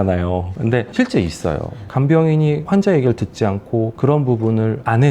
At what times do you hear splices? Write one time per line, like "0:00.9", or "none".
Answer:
0:01.8